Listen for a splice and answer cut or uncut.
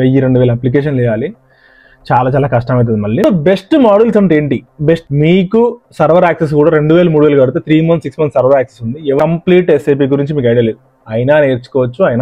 cut